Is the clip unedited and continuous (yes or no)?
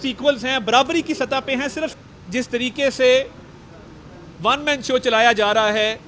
no